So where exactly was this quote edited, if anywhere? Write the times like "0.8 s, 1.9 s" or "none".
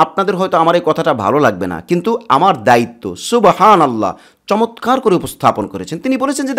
none